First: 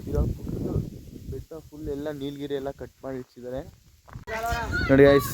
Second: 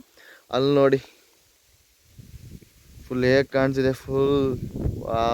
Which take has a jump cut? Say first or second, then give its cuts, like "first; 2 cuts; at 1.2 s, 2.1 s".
first; 1 cut; at 4.1 s